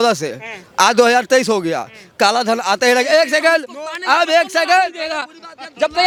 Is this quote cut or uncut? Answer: uncut